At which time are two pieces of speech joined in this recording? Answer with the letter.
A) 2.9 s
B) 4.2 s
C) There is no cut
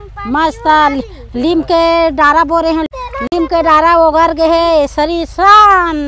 A